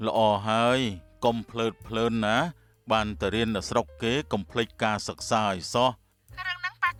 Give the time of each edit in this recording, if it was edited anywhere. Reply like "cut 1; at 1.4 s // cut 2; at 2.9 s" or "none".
none